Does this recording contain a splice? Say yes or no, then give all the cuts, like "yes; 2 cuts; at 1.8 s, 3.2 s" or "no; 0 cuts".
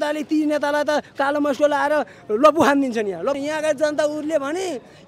yes; 1 cut; at 3.4 s